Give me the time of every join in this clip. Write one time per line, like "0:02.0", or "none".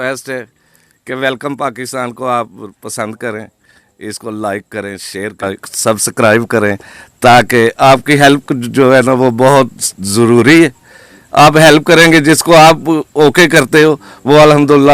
0:05.4